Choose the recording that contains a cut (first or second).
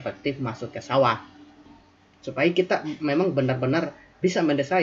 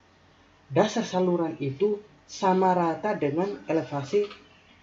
first